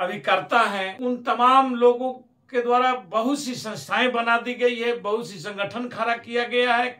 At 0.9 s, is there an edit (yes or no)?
yes